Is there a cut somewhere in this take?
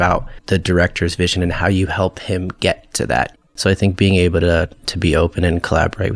yes; 1 cut; at 3.3 s

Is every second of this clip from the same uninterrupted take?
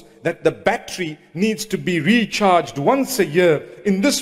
yes; 0 cuts

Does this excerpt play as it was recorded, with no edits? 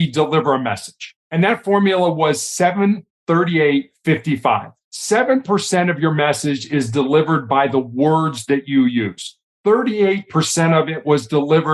no; 1 cut; at 4.8 s

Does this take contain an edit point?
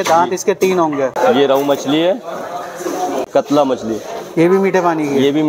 yes; 2 cuts; at 1.1 s, 3.3 s

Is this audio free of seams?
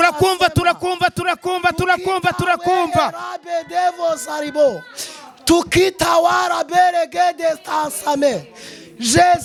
yes; 0 cuts

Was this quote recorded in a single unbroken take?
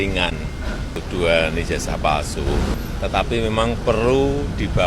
no; 2 cuts; at 1.0 s, 2.8 s

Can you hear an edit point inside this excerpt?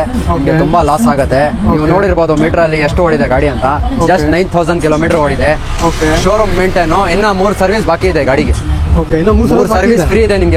no; 0 cuts

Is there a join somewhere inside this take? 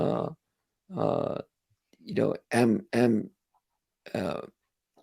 no; 0 cuts

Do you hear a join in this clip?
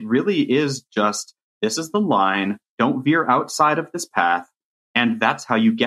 yes; 1 cut; at 2.7 s

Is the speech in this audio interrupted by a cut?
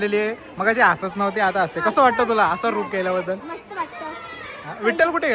no; 0 cuts

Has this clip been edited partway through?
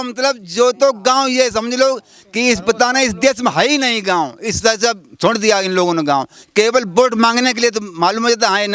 no; 0 cuts

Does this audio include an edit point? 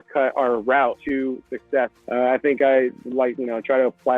yes; 2 cuts; at 1.0 s, 2.0 s

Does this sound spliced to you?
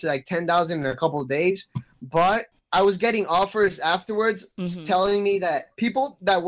yes; 1 cut; at 2.6 s

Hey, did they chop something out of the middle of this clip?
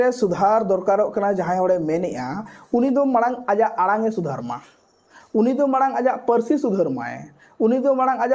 no; 0 cuts

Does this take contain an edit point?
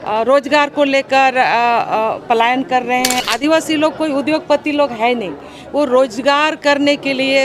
yes; 1 cut; at 3.2 s

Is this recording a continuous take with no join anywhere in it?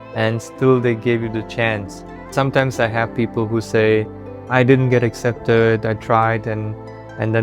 no; 1 cut; at 2.3 s

